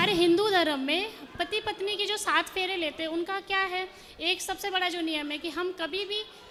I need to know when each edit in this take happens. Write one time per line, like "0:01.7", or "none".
none